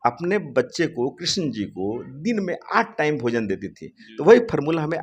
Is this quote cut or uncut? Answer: uncut